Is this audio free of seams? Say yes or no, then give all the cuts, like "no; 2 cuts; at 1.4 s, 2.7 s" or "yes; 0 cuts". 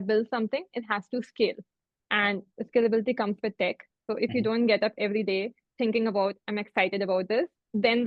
no; 1 cut; at 3.9 s